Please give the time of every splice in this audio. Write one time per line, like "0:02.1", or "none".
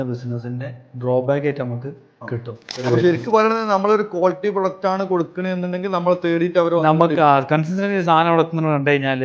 0:02.8